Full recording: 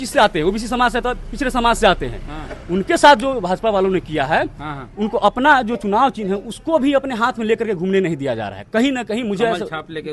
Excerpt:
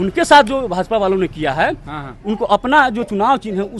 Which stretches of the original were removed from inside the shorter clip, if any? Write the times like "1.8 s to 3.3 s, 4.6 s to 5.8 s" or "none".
none